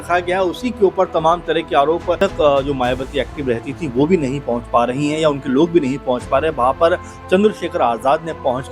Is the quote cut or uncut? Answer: cut